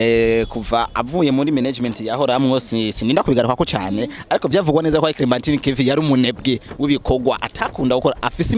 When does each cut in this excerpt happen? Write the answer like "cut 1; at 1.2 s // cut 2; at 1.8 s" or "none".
none